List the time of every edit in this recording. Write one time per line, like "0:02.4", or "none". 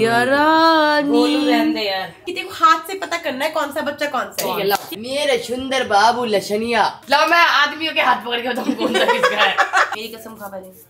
0:02.2
0:04.9
0:07.0
0:09.9